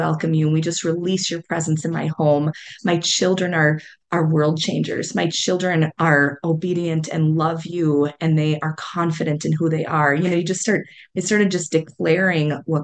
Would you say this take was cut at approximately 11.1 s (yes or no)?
no